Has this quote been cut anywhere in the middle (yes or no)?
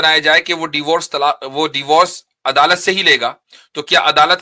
no